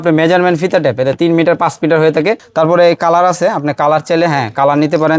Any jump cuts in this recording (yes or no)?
yes